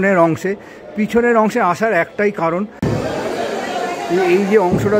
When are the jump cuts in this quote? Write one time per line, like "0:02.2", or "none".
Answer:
0:02.8